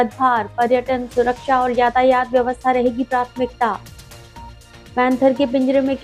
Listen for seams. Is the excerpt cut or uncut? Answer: uncut